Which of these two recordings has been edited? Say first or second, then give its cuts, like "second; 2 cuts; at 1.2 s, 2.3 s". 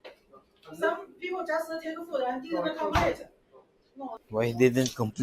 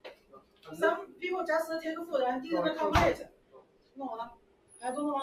first; 1 cut; at 4.2 s